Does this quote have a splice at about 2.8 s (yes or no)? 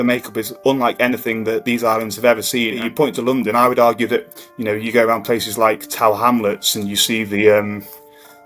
yes